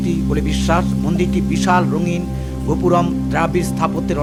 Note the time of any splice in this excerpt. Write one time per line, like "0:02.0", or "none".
none